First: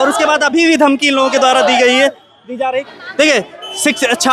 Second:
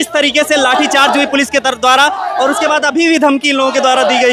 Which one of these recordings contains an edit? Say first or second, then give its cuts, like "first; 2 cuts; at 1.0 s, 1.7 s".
first; 1 cut; at 2.9 s